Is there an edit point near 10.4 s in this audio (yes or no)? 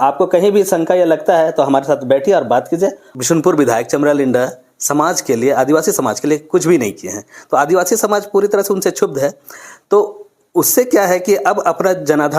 no